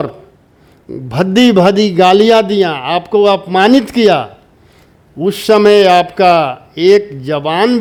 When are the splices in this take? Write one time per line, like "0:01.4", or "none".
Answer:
none